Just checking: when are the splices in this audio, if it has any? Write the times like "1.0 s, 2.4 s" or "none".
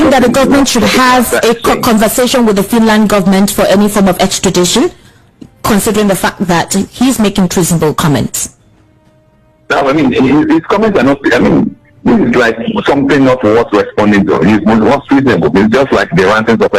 none